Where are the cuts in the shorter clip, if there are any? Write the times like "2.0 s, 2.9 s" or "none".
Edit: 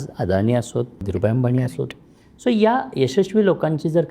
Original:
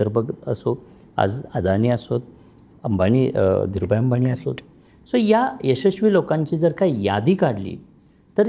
1.1 s